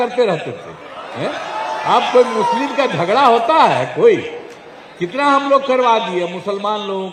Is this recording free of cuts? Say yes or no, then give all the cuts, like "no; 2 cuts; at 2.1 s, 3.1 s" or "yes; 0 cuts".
yes; 0 cuts